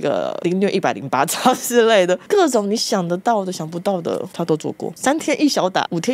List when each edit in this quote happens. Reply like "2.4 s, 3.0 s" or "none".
5.0 s